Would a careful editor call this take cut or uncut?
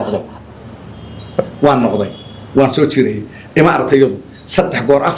uncut